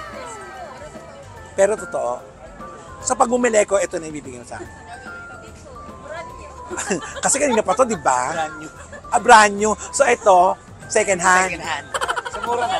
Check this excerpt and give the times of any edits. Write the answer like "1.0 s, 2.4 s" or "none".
none